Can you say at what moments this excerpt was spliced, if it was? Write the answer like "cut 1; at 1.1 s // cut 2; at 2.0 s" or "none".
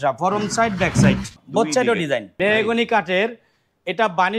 cut 1; at 1.3 s // cut 2; at 2.4 s

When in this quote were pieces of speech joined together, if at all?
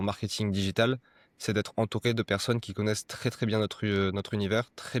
none

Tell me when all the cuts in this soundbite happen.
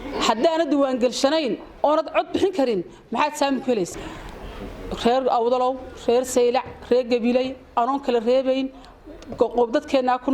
cut 1; at 3.9 s

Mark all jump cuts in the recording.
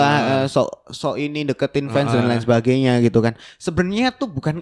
none

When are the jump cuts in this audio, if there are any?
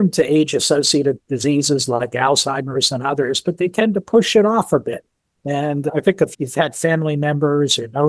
none

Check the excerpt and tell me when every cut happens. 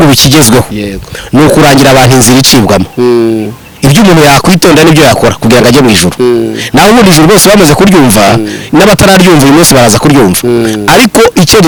none

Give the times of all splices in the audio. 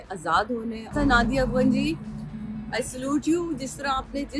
cut 1; at 0.9 s

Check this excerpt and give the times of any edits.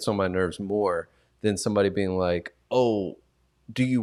none

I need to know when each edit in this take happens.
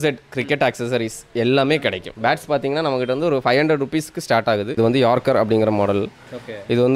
cut 1; at 2.1 s // cut 2; at 4.8 s

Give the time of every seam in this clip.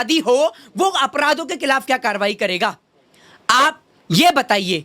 none

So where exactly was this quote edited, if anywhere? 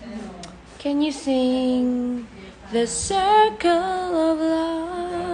none

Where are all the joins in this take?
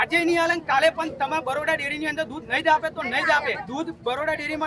cut 1; at 3.6 s

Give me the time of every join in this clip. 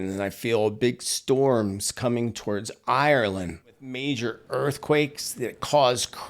cut 1; at 3.9 s

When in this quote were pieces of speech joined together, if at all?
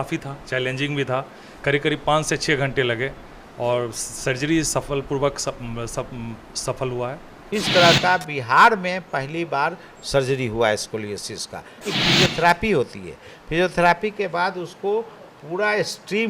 cut 1; at 7.3 s // cut 2; at 11.8 s

